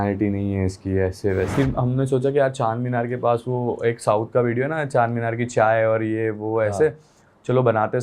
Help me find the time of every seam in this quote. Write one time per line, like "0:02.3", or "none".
0:01.5